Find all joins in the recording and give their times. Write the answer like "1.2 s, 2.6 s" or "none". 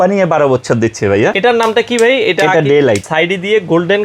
1.3 s, 3.1 s